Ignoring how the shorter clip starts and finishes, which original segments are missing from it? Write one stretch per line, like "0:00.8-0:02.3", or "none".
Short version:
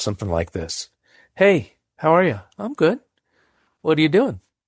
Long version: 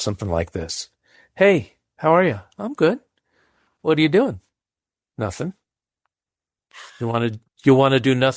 none